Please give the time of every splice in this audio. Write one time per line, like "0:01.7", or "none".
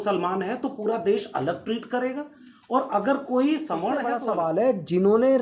0:04.1

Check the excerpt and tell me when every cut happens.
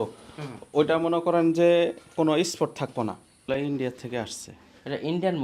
0:03.4

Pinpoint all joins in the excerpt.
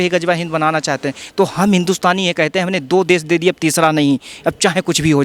0:01.2

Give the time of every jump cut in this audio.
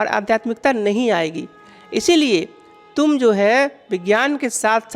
none

